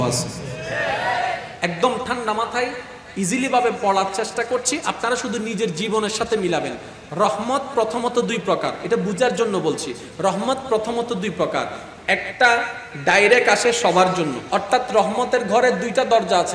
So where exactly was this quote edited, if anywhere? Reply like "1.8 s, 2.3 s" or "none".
14.4 s